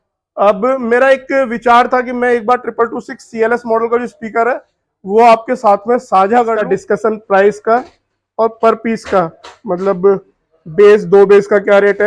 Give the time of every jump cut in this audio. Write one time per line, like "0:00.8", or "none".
0:06.6